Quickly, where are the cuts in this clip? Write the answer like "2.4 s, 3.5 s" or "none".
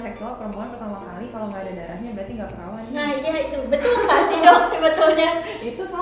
none